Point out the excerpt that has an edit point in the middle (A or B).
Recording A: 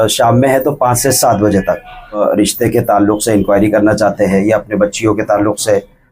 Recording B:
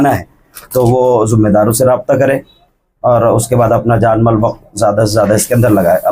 A